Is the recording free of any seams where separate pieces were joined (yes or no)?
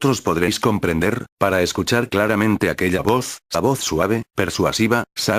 yes